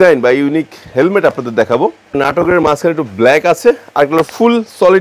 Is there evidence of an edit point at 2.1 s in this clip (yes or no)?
yes